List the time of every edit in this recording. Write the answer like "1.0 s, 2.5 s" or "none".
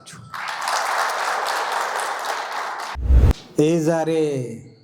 3.0 s